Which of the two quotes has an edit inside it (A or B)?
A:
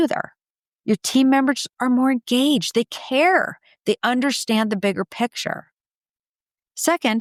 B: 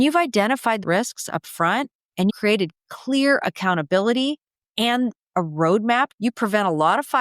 B